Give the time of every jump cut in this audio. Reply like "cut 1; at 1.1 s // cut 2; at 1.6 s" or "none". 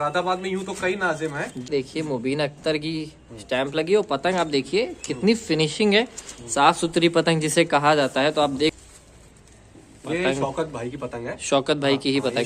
cut 1; at 1.7 s // cut 2; at 8.8 s